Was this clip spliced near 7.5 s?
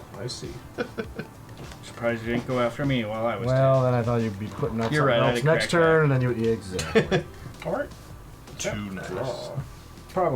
yes; 1 cut; at 7.5 s

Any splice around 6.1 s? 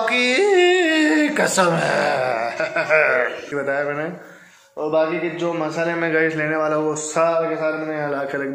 no; 1 cut; at 3.5 s

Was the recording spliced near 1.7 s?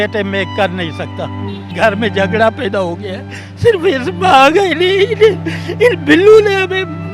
yes; 1 cut; at 1.7 s

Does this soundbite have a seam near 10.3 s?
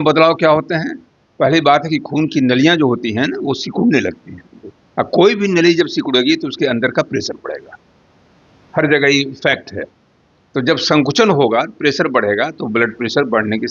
no; 0 cuts

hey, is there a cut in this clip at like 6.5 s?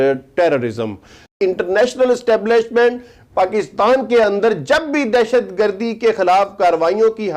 no; 1 cut; at 1.3 s

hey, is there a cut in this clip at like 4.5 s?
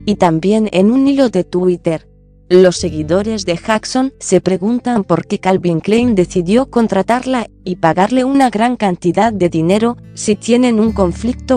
yes; 1 cut; at 4.5 s

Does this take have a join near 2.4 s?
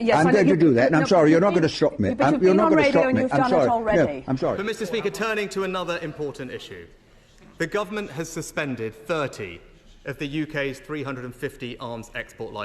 no; 1 cut; at 4.6 s

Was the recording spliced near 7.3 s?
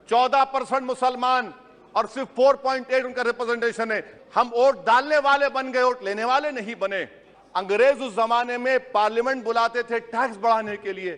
yes; 2 cuts; at 4.1 s, 7.3 s

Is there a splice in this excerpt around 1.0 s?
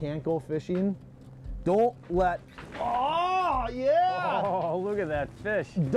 no; 0 cuts

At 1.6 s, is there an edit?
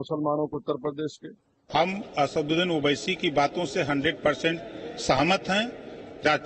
yes; 1 cut; at 1.6 s

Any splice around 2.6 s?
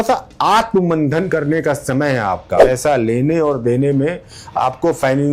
yes; 1 cut; at 2.6 s

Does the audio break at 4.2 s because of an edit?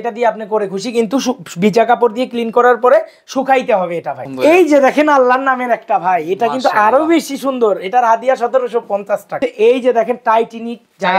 yes; 2 cuts; at 4.2 s, 9.4 s

